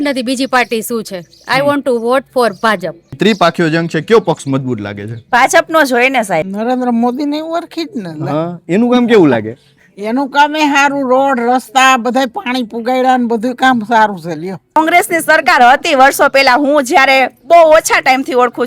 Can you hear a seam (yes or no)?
yes